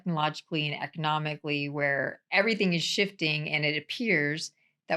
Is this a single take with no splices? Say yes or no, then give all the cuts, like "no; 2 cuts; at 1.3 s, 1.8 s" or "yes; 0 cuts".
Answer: yes; 0 cuts